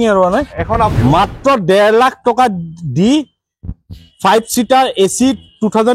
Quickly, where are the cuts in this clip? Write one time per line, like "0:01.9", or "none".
0:00.9